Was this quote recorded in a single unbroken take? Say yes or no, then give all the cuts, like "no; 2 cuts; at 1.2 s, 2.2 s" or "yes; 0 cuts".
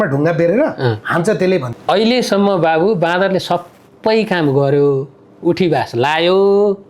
no; 1 cut; at 1.7 s